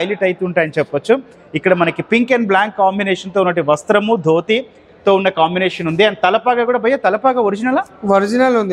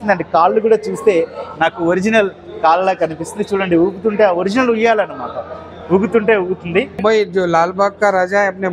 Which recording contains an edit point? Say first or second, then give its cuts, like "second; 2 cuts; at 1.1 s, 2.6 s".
second; 1 cut; at 7.0 s